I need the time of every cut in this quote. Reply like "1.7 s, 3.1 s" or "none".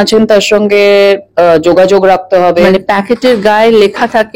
2.7 s